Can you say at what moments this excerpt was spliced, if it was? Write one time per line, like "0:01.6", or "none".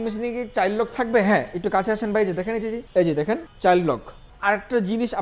0:02.8
0:03.5
0:04.3